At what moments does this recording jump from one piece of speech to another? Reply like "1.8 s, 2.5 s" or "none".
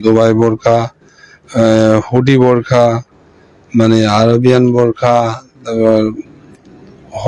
none